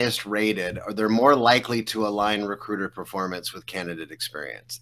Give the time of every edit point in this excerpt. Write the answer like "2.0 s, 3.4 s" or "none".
none